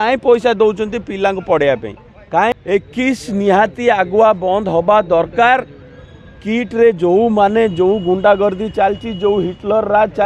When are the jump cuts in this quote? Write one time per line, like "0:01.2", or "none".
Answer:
0:02.5